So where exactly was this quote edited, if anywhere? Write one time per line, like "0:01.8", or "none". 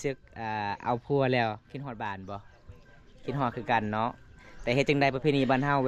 none